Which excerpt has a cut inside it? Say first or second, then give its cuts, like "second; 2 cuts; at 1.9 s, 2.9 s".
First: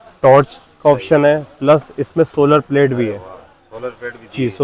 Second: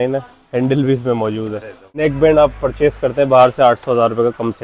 second; 1 cut; at 2.0 s